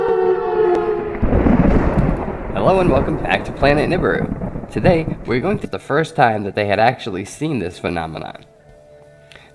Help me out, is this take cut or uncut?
uncut